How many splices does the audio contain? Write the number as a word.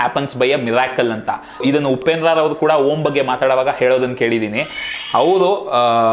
one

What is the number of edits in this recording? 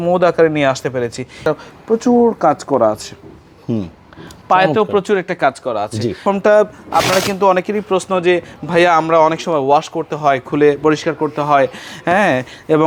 two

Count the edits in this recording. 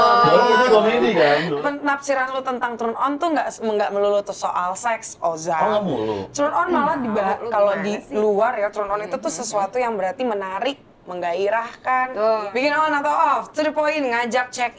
two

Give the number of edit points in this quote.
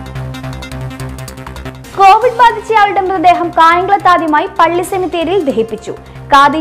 one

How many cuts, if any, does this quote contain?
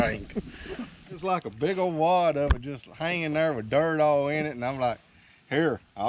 one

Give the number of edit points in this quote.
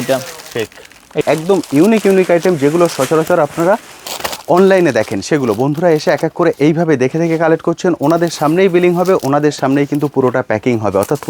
one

